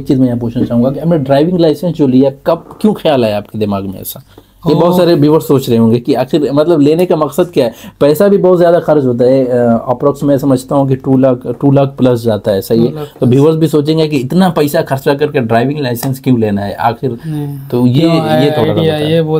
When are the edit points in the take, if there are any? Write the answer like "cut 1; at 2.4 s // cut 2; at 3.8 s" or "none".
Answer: none